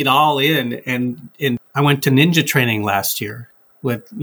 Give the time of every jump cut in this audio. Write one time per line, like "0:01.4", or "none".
0:01.6